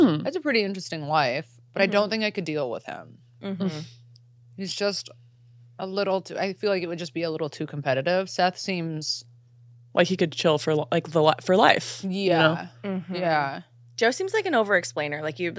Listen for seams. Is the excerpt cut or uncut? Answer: uncut